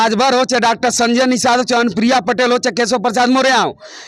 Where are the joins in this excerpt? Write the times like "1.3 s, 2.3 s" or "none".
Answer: none

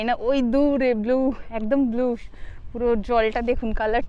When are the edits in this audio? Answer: none

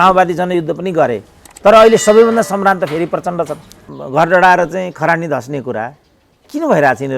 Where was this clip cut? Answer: 4.0 s

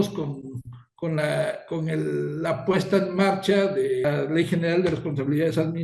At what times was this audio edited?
4.0 s

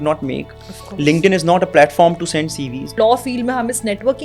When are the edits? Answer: 2.9 s

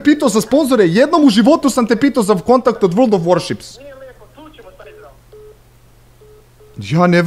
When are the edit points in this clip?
none

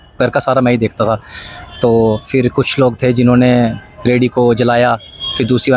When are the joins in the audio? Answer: none

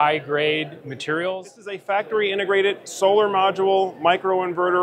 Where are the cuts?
1.8 s

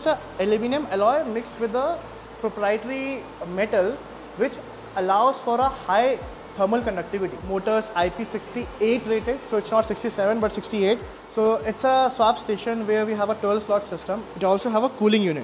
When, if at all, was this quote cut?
7.4 s, 11.2 s, 14.3 s

